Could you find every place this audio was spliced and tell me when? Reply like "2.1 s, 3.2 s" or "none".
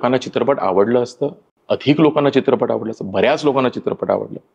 1.5 s